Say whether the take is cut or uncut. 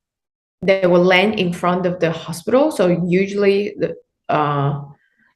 uncut